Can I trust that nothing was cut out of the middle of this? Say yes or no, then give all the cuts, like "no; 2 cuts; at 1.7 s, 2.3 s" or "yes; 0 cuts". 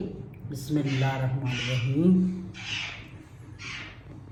yes; 0 cuts